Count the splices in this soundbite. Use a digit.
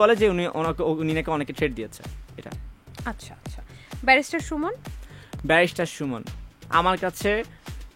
0